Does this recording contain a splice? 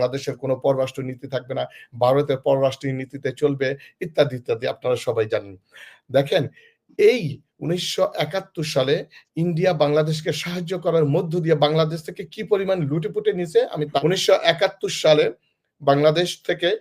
yes; 1 cut; at 14.0 s

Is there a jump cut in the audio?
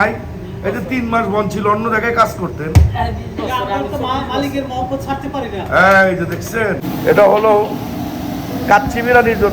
yes; 1 cut; at 6.8 s

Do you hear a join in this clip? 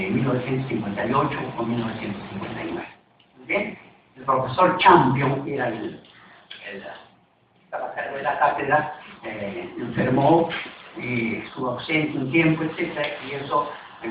no; 0 cuts

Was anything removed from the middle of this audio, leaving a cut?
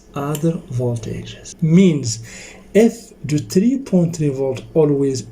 yes; 1 cut; at 1.5 s

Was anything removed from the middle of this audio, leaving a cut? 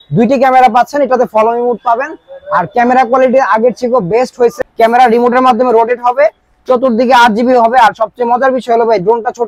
yes; 1 cut; at 4.6 s

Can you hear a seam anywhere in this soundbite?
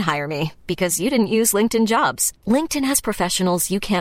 no; 0 cuts

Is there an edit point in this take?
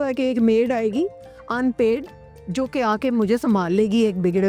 no; 0 cuts

